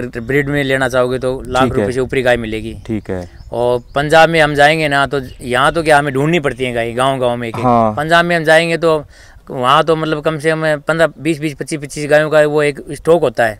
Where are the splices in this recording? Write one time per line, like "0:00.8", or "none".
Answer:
none